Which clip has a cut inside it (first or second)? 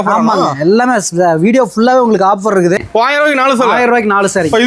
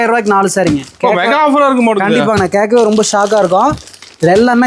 first